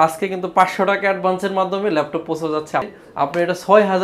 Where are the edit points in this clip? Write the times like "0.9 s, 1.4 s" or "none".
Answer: 2.9 s